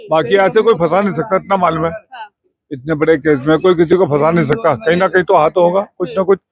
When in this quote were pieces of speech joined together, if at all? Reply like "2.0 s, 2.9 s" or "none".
none